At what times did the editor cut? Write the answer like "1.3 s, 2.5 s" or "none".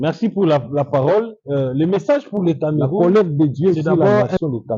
3.0 s